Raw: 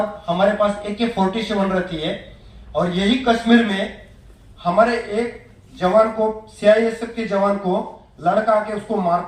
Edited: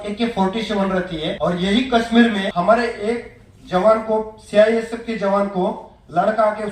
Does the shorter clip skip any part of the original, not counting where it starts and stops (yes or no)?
yes